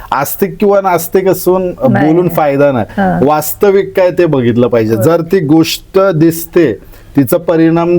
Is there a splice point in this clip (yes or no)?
no